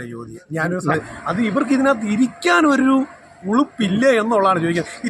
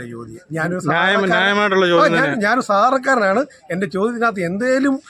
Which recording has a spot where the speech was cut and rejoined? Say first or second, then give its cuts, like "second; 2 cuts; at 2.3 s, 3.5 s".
first; 1 cut; at 1.0 s